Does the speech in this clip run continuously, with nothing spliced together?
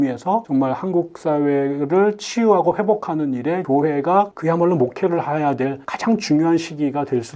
yes; 0 cuts

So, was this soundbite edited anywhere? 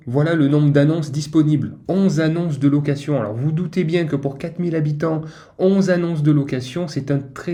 no; 0 cuts

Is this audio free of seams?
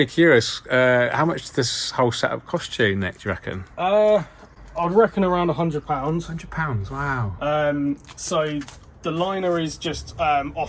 yes; 0 cuts

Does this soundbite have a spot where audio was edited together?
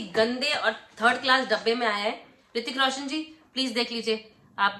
no; 0 cuts

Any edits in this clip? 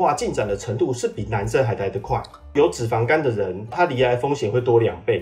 yes; 2 cuts; at 2.5 s, 3.7 s

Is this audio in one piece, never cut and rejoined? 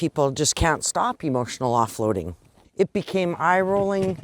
no; 1 cut; at 2.6 s

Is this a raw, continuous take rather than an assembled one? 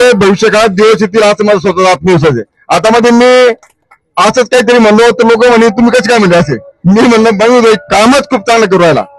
yes; 0 cuts

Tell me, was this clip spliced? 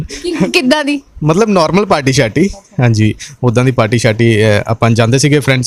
no; 0 cuts

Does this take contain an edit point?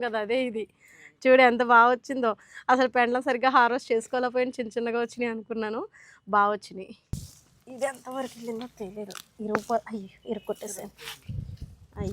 yes; 1 cut; at 7.2 s

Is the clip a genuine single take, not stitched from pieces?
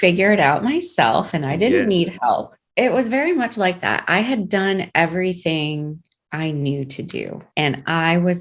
no; 2 cuts; at 2.6 s, 7.4 s

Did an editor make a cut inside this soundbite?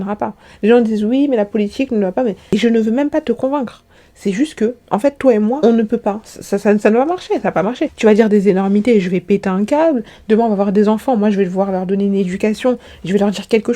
yes; 1 cut; at 2.5 s

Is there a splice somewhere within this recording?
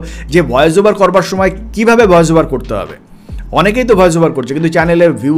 no; 0 cuts

